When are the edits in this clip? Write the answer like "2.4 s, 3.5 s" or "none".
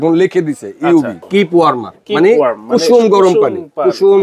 1.2 s